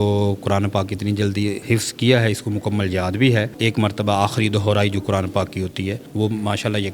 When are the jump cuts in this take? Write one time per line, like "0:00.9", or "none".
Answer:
0:01.6
0:03.5
0:06.0